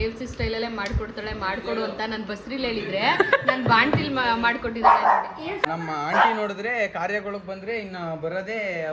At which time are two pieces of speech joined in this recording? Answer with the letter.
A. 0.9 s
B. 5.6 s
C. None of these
B